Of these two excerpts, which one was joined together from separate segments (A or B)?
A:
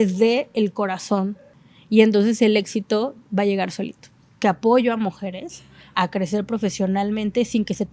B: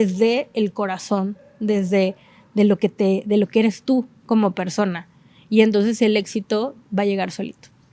A